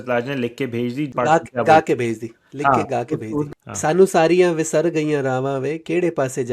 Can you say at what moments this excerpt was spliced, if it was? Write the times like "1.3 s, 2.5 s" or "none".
1.1 s, 3.5 s